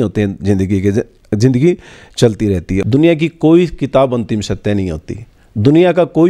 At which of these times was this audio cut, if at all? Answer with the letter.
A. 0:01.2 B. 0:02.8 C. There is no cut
B